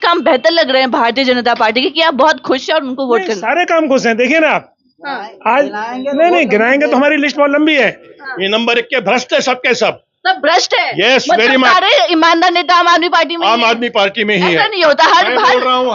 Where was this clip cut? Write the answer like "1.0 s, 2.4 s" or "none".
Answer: 8.1 s